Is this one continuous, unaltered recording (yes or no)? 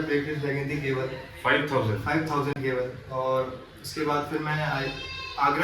yes